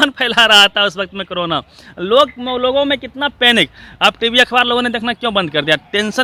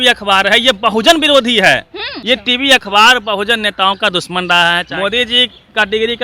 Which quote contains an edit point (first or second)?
second